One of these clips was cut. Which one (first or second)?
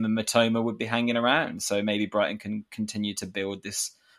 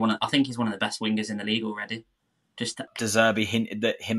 second